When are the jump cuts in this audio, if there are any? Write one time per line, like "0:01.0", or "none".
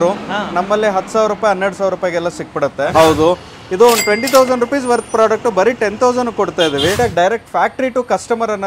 0:02.9
0:07.0